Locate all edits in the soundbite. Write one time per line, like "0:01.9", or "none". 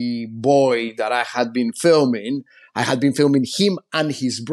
none